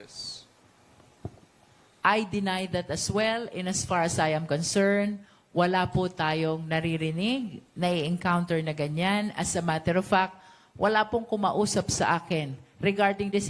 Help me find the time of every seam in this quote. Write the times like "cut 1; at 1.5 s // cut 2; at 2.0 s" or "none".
none